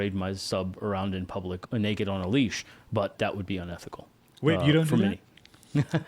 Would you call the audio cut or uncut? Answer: cut